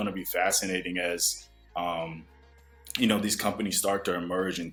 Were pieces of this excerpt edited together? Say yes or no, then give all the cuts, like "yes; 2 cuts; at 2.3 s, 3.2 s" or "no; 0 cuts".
no; 0 cuts